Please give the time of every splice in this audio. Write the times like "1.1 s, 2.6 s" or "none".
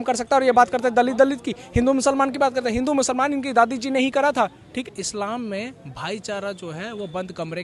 4.8 s